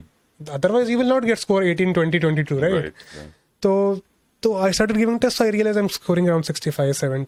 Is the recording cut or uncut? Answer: uncut